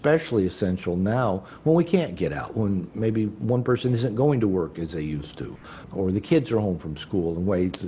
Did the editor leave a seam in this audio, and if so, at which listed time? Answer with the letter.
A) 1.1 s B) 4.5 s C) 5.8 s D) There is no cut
C